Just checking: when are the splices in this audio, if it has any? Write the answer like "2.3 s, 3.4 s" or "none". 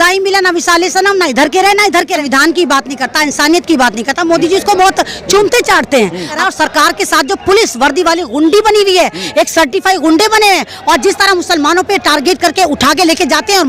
2.2 s, 6.3 s